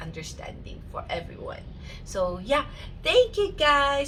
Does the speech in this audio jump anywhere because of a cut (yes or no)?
no